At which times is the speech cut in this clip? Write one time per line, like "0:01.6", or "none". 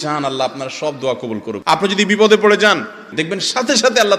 0:01.6
0:03.1